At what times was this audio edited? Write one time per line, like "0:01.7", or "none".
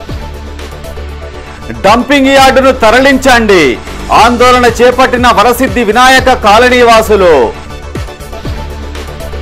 0:01.2